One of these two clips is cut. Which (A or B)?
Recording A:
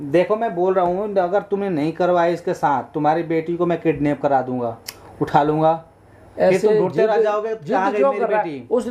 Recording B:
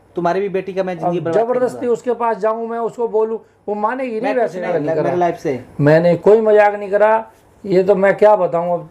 B